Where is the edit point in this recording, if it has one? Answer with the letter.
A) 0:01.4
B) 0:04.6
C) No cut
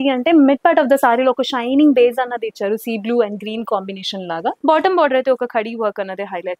B